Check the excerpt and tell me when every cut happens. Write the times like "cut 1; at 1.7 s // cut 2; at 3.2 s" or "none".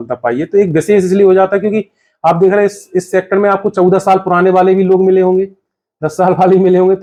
none